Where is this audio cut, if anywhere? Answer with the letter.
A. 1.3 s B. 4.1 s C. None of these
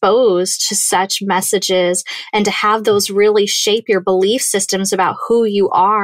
C